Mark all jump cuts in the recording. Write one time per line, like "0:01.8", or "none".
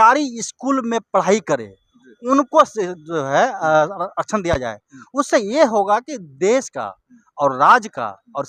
none